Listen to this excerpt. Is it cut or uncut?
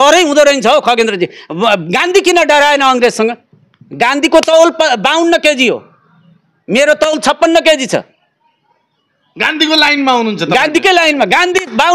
uncut